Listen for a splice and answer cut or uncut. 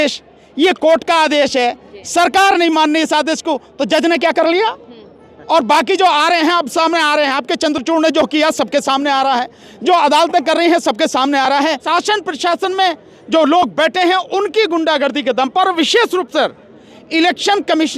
cut